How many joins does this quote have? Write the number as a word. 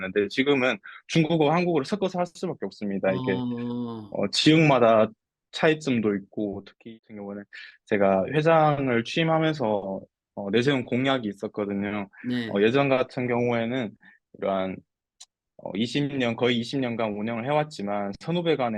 one